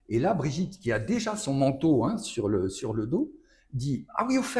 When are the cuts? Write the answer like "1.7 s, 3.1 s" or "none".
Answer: none